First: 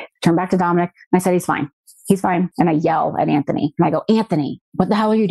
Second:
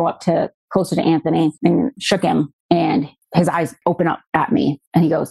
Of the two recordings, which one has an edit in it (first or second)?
second